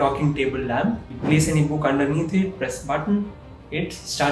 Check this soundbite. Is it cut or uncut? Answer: cut